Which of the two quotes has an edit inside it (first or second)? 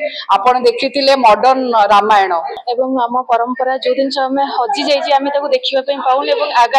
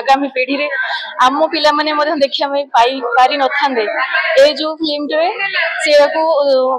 first